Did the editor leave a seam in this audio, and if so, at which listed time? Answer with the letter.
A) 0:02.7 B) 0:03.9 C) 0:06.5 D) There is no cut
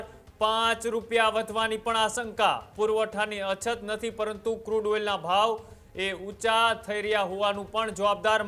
A